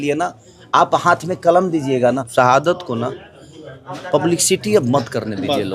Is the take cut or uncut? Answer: cut